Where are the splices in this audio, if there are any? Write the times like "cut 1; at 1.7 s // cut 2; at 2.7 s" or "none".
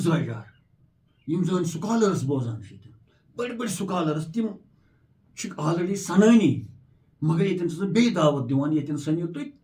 none

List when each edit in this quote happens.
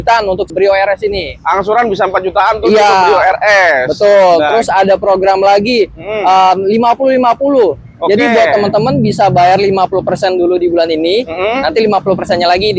none

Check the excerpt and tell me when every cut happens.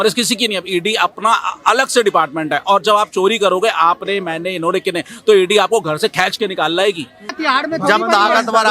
cut 1; at 7.3 s

